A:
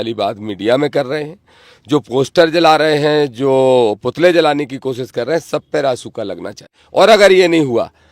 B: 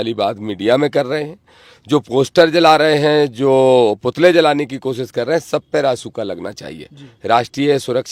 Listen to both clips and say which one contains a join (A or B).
A